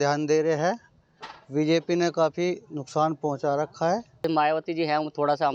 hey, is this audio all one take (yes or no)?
no